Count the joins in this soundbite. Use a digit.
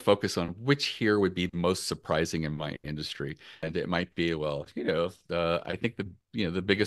1